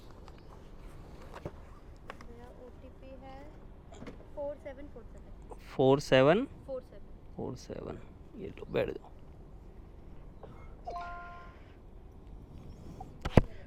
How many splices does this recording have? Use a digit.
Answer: 0